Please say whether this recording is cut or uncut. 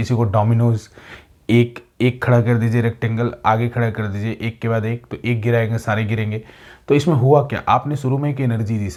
uncut